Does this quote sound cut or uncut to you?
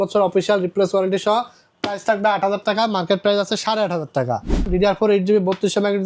cut